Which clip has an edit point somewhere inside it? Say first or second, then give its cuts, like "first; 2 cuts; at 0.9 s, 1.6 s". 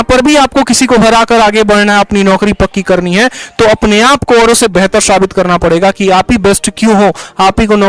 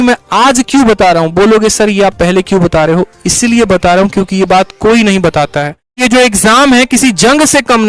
second; 1 cut; at 6.0 s